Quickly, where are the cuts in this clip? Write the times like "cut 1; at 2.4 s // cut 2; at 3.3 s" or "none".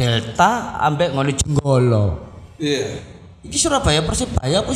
none